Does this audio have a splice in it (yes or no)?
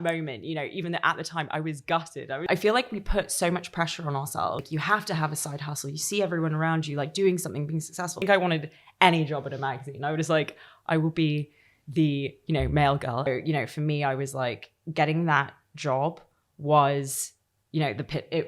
yes